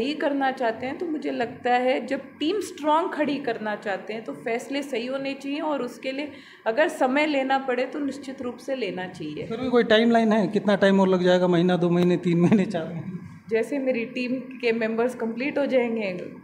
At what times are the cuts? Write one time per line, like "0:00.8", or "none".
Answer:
none